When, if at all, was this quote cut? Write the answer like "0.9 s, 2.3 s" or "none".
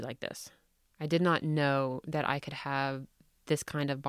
none